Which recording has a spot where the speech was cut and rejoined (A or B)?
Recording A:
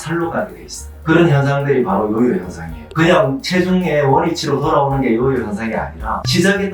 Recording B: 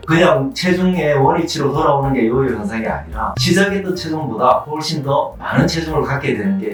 A